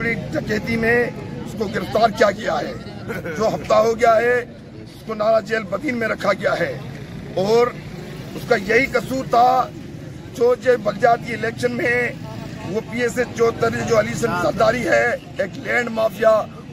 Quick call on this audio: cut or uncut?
uncut